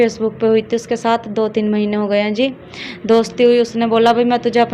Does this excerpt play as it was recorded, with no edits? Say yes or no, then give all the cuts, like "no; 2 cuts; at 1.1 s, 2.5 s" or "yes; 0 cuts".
yes; 0 cuts